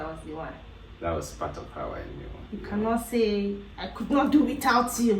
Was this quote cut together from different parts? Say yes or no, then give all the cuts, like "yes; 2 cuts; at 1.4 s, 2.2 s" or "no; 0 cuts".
no; 0 cuts